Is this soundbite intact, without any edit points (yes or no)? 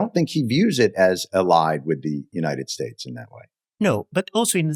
yes